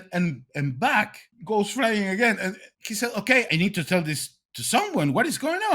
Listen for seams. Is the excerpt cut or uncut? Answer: cut